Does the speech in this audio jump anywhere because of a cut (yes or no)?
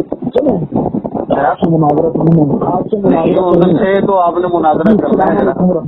no